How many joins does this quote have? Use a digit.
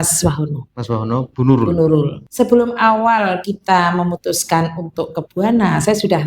1